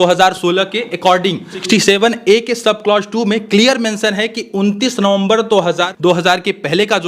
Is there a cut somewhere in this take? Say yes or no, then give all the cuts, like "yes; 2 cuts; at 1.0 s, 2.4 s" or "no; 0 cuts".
yes; 2 cuts; at 1.6 s, 5.9 s